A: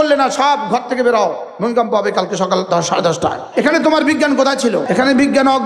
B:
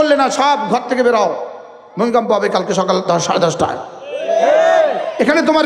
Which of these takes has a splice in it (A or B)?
A